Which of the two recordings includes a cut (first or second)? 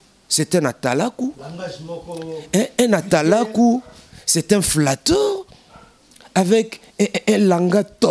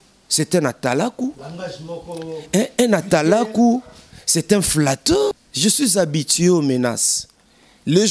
second